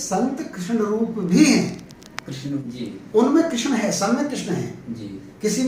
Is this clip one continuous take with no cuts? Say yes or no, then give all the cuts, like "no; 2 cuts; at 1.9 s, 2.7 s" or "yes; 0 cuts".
no; 1 cut; at 2.7 s